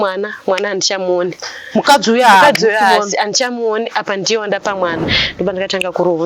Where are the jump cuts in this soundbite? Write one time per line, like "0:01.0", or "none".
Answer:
0:05.2